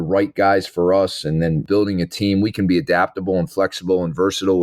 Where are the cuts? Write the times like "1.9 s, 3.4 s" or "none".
1.6 s